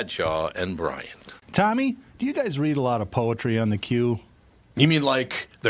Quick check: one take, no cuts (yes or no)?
no